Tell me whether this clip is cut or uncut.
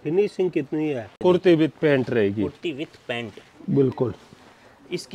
cut